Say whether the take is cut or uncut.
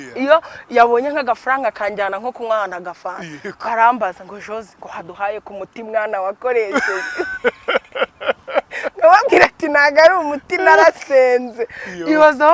uncut